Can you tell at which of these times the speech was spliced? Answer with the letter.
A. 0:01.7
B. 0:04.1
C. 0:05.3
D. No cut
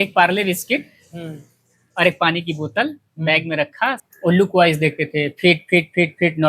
B